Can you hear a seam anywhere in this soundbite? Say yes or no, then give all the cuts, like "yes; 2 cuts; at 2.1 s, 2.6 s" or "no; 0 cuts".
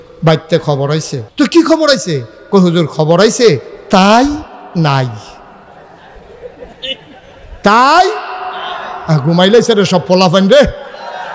yes; 1 cut; at 1.2 s